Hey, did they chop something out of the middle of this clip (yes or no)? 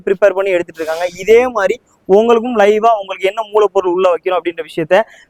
no